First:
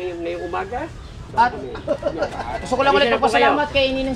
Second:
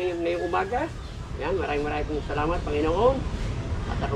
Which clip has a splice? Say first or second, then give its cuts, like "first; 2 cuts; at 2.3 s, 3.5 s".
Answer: first; 1 cut; at 1.3 s